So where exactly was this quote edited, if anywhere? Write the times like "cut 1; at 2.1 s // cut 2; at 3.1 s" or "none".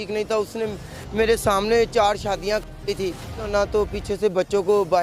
cut 1; at 3.5 s